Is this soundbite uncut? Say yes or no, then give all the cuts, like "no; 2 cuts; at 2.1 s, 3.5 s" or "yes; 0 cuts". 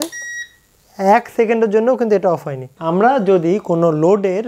no; 1 cut; at 2.8 s